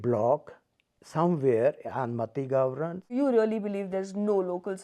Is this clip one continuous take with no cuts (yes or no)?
no